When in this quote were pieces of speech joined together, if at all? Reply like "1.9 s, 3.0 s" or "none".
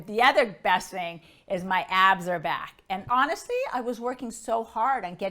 3.0 s